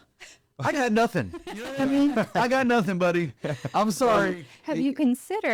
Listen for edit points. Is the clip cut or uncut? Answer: uncut